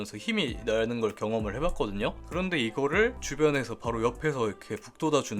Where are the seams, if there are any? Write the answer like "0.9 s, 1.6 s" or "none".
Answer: 3.2 s